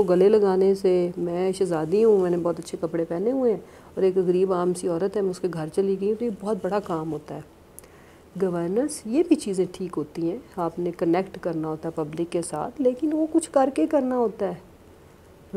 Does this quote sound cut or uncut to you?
uncut